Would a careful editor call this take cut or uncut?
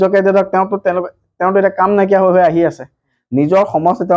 uncut